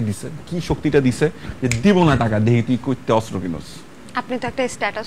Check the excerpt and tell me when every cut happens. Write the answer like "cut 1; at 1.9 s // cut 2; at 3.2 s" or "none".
none